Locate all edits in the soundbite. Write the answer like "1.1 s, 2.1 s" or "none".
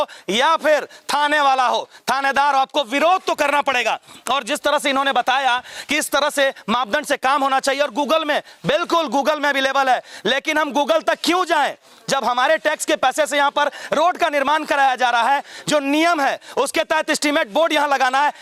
none